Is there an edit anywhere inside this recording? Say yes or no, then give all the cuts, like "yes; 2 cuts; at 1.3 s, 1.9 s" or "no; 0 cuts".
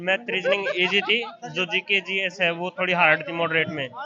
no; 0 cuts